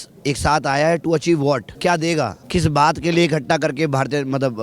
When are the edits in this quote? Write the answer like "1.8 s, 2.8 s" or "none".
1.7 s, 2.4 s